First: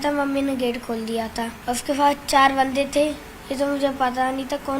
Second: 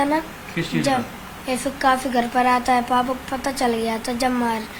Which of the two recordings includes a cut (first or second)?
first